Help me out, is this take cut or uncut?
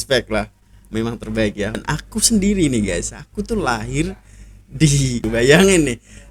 cut